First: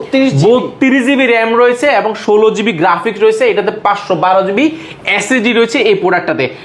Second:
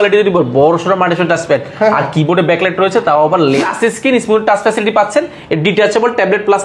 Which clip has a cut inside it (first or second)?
second